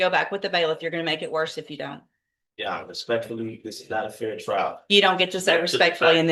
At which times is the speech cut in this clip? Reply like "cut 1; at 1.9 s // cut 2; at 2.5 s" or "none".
none